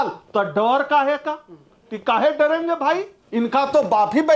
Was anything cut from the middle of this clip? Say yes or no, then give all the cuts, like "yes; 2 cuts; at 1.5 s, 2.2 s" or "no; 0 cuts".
yes; 1 cut; at 3.2 s